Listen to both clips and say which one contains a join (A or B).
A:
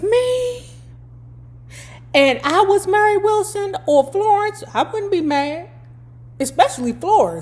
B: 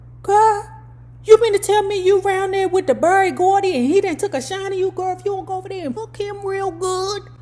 B